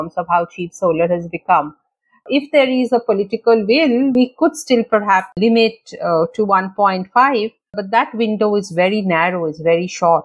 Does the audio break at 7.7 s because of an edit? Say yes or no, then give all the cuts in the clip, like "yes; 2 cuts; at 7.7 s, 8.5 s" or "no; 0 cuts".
yes; 4 cuts; at 2.3 s, 4.1 s, 5.4 s, 7.7 s